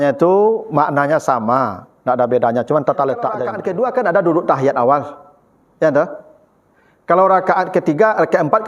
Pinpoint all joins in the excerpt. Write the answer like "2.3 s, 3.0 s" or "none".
3.6 s